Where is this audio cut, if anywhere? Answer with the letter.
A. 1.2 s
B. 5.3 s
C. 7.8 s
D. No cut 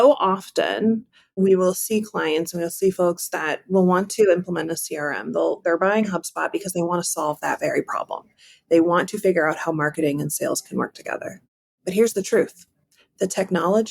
A